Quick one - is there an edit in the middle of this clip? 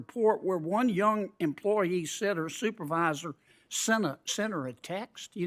no; 0 cuts

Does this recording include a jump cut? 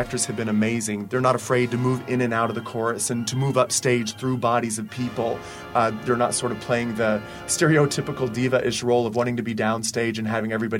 yes; 1 cut; at 1.0 s

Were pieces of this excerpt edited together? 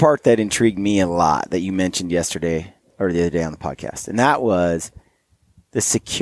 no; 0 cuts

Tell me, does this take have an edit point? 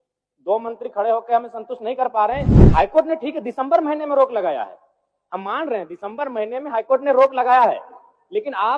no; 0 cuts

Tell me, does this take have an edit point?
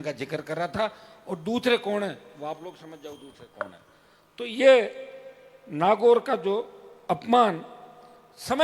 no; 0 cuts

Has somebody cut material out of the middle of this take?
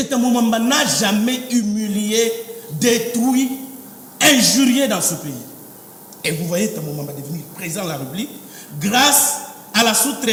no; 0 cuts

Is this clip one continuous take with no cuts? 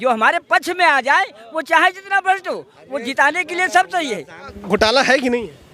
no; 1 cut; at 4.5 s

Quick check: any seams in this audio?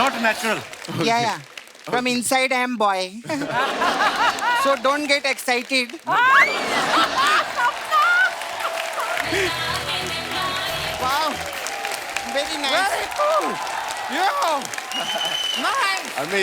no; 0 cuts

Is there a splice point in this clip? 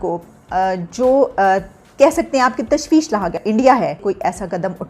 yes; 2 cuts; at 3.4 s, 4.0 s

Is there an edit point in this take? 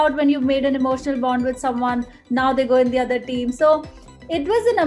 no; 0 cuts

